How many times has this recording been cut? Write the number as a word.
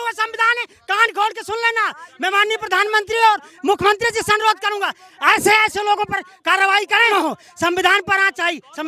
one